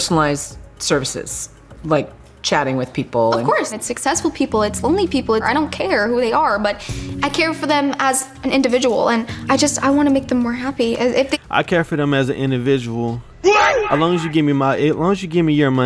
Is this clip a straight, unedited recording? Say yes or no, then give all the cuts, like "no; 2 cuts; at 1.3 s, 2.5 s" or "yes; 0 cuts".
yes; 0 cuts